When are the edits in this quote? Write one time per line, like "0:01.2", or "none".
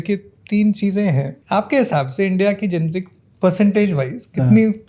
0:01.3